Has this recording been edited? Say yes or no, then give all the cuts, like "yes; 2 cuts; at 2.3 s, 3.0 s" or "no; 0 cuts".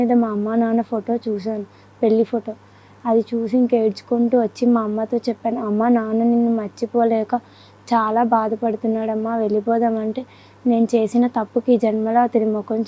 no; 0 cuts